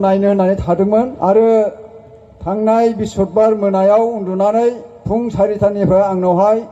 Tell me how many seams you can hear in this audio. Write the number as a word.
one